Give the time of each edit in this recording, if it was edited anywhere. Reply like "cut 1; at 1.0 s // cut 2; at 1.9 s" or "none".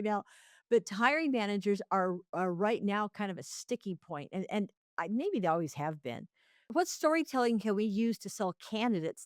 cut 1; at 6.7 s